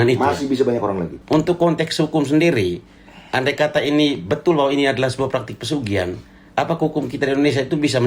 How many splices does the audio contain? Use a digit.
1